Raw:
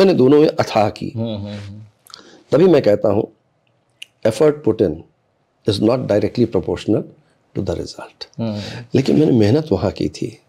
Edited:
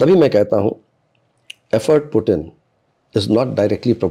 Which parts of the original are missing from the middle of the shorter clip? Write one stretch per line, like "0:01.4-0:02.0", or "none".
none